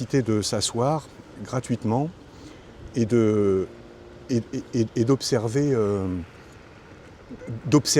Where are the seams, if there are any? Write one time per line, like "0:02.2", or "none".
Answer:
none